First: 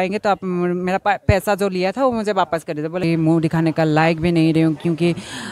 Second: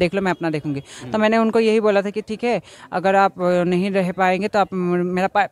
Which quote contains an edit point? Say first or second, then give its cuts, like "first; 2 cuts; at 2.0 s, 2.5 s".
first; 1 cut; at 3.0 s